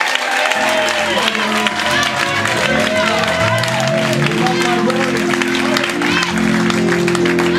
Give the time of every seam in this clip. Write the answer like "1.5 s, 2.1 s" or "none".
none